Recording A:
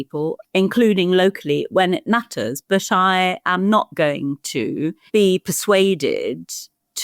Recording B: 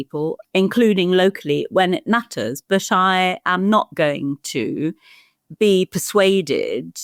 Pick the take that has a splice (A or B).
A